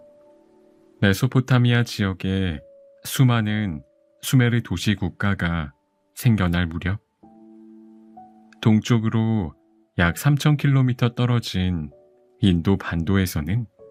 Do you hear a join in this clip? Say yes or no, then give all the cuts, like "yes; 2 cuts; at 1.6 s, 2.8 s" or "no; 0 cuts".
no; 0 cuts